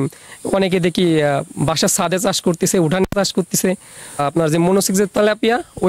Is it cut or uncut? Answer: cut